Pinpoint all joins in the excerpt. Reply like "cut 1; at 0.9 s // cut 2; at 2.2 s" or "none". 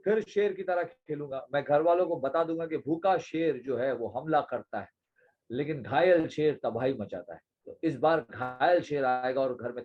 none